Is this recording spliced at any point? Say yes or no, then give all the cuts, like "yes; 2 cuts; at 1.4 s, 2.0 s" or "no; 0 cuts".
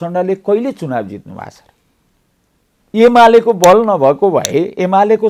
no; 0 cuts